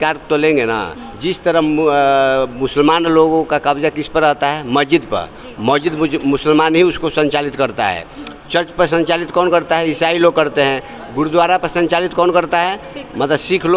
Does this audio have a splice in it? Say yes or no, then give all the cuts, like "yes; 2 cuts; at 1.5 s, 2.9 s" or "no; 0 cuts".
no; 0 cuts